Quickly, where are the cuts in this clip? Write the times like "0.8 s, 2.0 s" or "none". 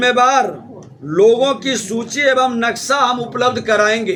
none

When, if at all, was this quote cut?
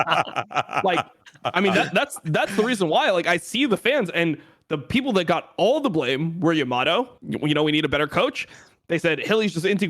7.1 s

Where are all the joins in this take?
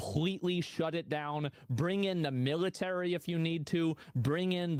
none

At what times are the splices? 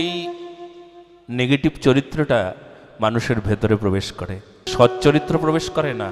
4.6 s

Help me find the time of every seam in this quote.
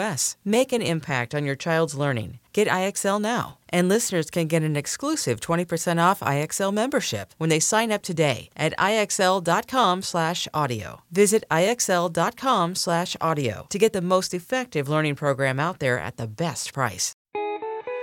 17.1 s

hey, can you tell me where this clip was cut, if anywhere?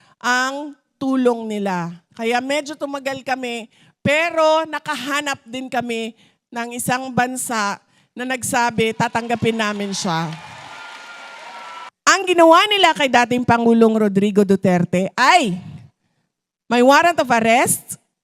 11.9 s

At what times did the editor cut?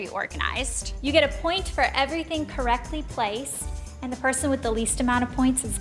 none

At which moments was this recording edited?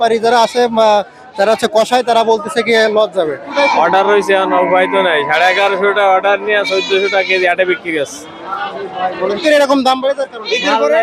3.5 s, 9.4 s

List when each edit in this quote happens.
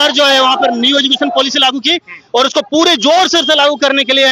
none

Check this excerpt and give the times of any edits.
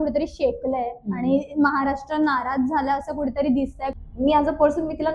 3.9 s

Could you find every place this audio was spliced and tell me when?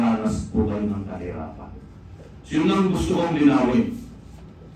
none

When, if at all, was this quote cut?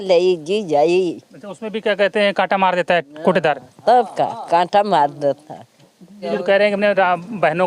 6.2 s

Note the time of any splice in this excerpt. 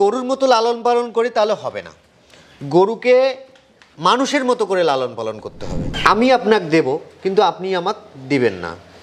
5.8 s

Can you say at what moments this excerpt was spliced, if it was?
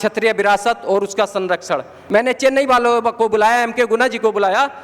1.9 s

